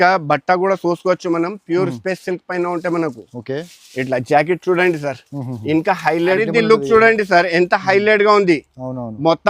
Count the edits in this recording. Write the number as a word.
one